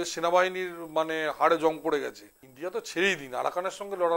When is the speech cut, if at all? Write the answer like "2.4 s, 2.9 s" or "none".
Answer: 2.4 s